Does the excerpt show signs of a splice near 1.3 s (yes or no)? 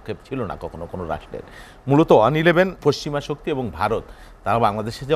no